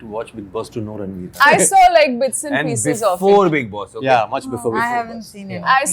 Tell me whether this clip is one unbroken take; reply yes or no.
no